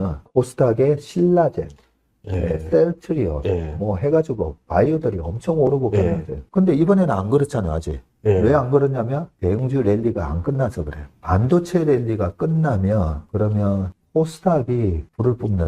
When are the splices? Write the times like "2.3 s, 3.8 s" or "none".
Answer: 11.0 s, 13.6 s